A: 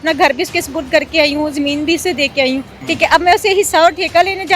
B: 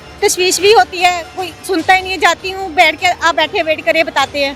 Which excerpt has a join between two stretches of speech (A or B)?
A